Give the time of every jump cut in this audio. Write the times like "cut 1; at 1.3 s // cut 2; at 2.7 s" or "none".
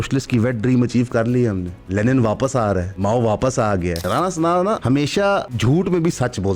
cut 1; at 1.7 s // cut 2; at 2.9 s // cut 3; at 4.0 s // cut 4; at 5.2 s